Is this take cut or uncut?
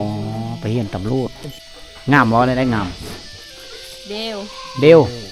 cut